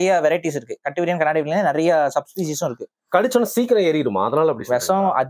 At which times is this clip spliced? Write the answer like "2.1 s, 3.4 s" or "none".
none

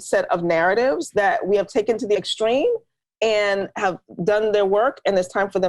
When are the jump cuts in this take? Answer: 1.1 s, 2.2 s

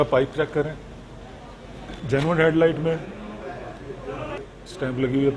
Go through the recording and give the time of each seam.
1.9 s, 4.4 s

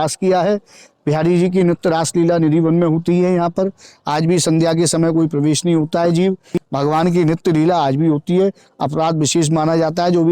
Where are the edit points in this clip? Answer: 6.6 s

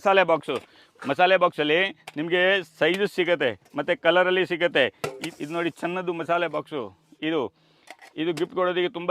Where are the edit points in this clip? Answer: 5.2 s

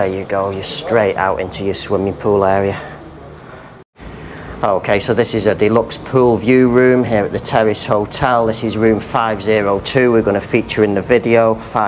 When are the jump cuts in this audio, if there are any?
none

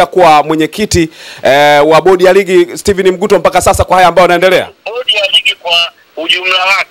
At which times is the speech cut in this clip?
4.8 s

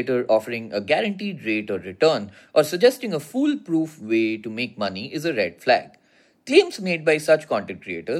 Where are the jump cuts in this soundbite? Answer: none

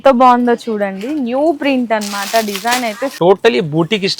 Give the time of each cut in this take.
3.1 s

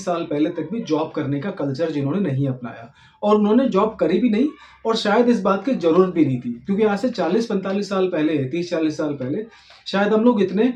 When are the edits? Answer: none

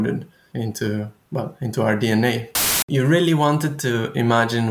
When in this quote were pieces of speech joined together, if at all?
2.7 s

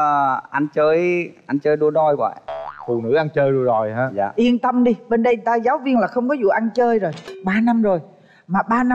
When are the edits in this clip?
7.3 s

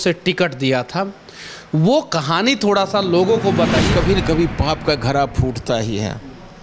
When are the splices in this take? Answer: 3.9 s

